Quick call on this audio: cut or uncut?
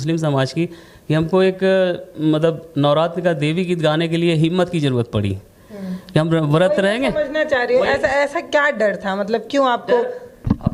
uncut